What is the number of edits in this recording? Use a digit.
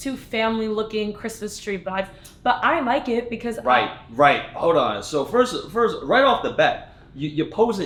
0